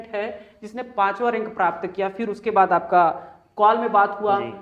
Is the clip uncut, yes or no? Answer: yes